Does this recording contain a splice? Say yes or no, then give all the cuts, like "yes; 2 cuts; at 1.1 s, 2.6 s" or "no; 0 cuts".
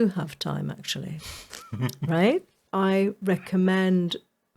yes; 1 cut; at 2.6 s